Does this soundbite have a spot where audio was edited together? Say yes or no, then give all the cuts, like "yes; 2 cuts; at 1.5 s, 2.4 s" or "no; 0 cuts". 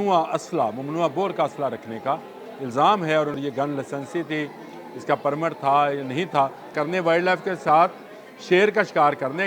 yes; 2 cuts; at 3.4 s, 6.7 s